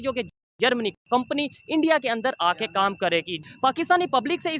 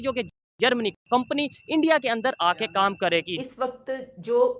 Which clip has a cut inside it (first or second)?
second